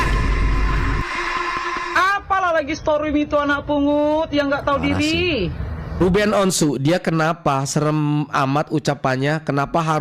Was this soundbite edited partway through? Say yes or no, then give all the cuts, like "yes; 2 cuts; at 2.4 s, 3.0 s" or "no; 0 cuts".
yes; 2 cuts; at 2.0 s, 6.0 s